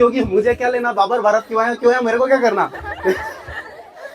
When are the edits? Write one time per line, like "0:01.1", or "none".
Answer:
none